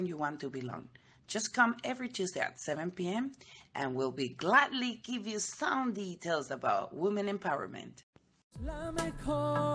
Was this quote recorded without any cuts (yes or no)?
no